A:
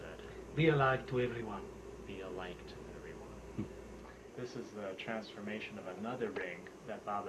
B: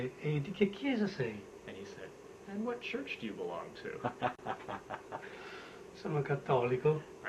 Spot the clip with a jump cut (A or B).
A